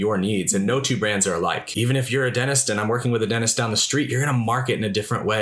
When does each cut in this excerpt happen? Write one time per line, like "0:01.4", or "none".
0:01.7